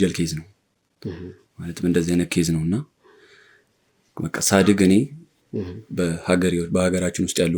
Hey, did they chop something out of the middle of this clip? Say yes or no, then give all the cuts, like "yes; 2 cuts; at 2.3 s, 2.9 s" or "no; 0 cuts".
no; 0 cuts